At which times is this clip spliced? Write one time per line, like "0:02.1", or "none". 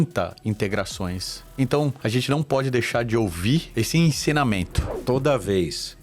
0:02.0
0:03.7
0:04.9